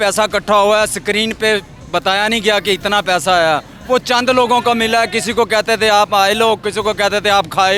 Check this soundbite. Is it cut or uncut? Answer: uncut